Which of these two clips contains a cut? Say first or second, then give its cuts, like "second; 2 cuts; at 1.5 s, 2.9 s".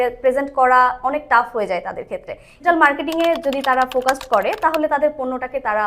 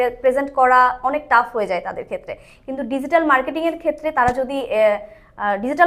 first; 1 cut; at 2.5 s